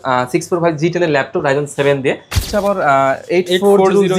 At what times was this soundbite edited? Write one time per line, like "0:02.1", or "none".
0:02.5